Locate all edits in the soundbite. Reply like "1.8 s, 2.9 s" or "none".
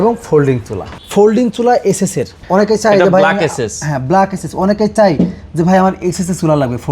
0.9 s, 2.4 s